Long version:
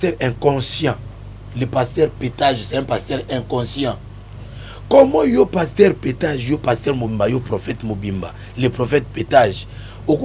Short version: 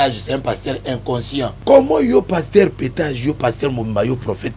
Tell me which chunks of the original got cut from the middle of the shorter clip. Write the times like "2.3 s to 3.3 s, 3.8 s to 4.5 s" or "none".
4.0 s to 4.8 s